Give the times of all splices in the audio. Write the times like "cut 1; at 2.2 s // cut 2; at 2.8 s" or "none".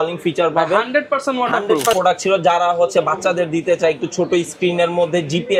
cut 1; at 2.0 s